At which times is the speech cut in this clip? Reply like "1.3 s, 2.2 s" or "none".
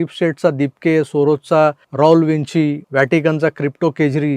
1.8 s, 2.8 s